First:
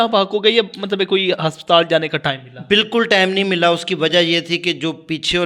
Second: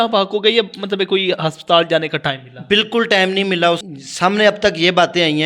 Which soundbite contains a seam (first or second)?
second